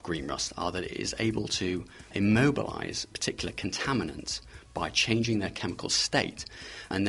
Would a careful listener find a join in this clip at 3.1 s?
yes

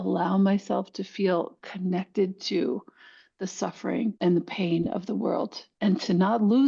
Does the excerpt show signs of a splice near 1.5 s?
no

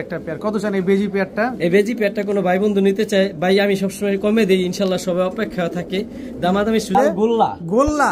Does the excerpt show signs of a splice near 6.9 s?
yes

